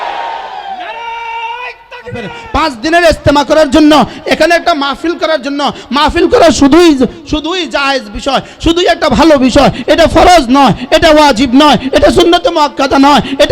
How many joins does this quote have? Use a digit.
1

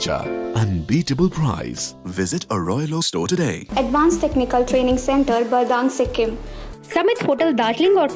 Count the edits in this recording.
2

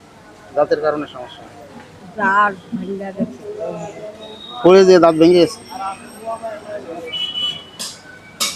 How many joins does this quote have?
0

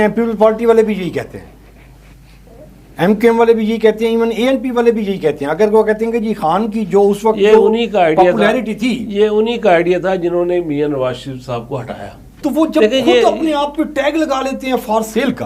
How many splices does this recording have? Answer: 1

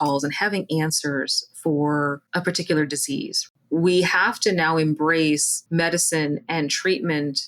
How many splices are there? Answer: 1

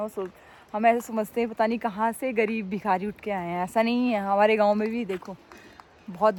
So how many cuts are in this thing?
0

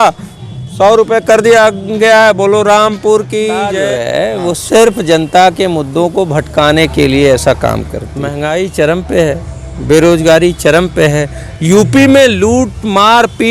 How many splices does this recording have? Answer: 2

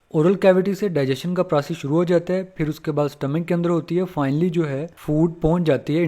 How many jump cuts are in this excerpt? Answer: 1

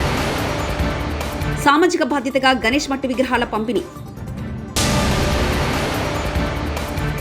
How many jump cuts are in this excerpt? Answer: 0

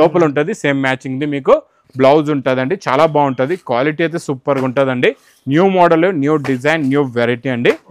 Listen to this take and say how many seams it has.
0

